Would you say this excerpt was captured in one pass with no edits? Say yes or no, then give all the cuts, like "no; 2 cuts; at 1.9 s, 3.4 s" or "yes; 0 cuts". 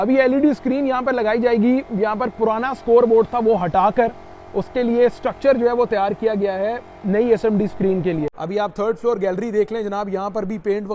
no; 1 cut; at 8.3 s